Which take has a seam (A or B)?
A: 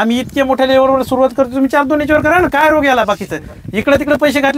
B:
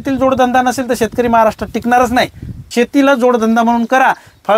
B